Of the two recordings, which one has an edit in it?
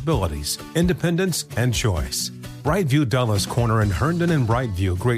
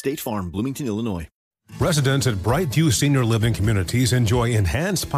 second; 1 cut; at 1.3 s

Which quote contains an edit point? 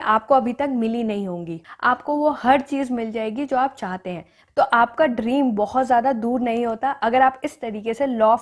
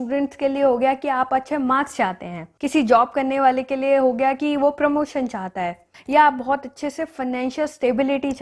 first; 2 cuts; at 1.6 s, 4.3 s

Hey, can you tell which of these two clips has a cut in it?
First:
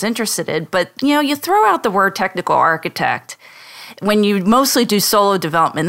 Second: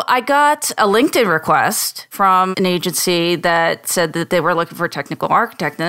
second; 2 cuts; at 0.8 s, 2.3 s

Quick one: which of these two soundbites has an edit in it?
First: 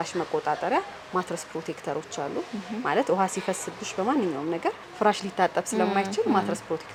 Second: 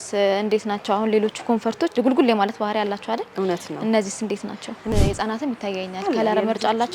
second; 2 cuts; at 1.9 s, 4.9 s

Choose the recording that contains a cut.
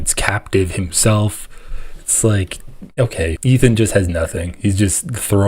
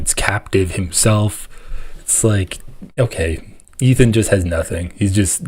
first; 1 cut; at 3.4 s

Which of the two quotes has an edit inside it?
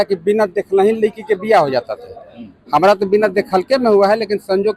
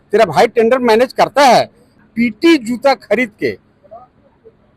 second; 1 cut; at 2.0 s

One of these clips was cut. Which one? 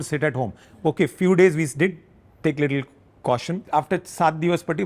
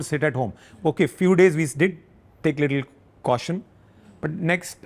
first; 1 cut; at 3.6 s

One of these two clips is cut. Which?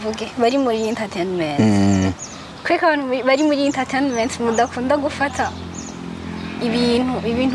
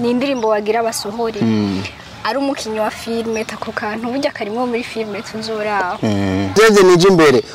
second; 1 cut; at 6.5 s

